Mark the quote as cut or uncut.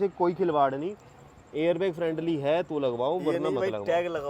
uncut